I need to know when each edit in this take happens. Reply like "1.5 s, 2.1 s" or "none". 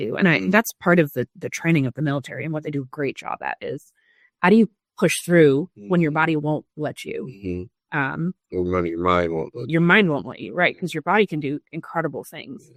none